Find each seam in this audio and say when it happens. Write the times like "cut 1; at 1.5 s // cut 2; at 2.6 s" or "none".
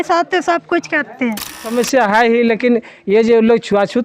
cut 1; at 1.6 s